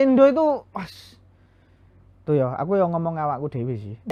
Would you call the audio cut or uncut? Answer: uncut